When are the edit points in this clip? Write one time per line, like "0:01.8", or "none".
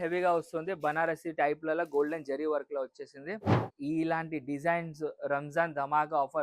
0:03.6